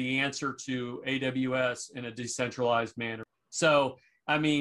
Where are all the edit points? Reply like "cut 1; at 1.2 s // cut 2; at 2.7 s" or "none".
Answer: cut 1; at 3.2 s